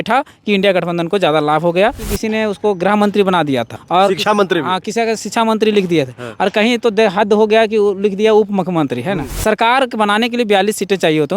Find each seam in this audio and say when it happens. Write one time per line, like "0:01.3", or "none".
0:02.1
0:03.7
0:09.3